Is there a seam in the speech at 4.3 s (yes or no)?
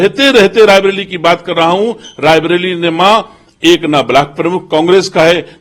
no